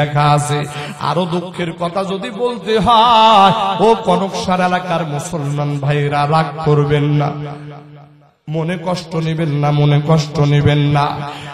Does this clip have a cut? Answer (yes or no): no